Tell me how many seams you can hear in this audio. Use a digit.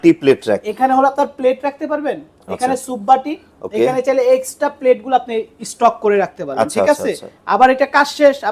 0